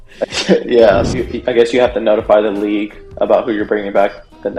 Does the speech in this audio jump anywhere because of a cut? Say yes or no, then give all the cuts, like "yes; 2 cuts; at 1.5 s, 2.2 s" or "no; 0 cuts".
yes; 1 cut; at 1.1 s